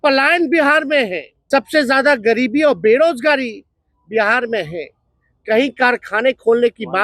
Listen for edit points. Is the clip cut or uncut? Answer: cut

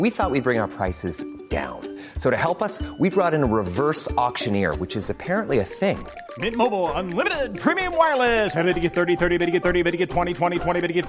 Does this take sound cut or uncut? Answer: uncut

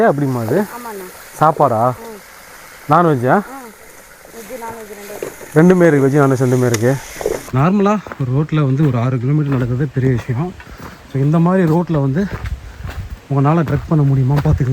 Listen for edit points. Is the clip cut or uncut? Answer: cut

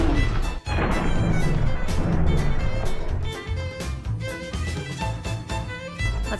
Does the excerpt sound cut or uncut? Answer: cut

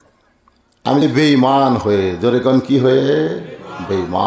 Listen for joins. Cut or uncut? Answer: cut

